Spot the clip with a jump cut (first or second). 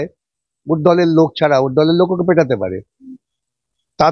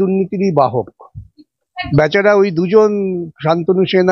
second